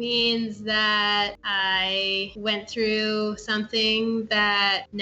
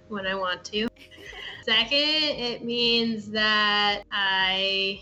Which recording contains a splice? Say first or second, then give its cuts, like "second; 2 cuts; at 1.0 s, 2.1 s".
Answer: second; 1 cut; at 1.6 s